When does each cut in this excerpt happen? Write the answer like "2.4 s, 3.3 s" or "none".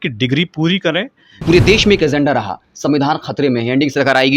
1.3 s